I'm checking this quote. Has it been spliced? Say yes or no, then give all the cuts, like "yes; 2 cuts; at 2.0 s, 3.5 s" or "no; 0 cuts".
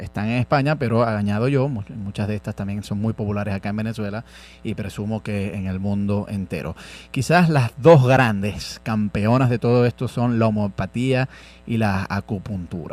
no; 0 cuts